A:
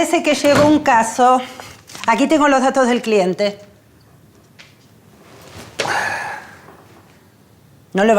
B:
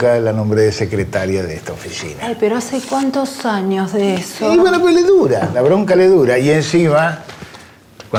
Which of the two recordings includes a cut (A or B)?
A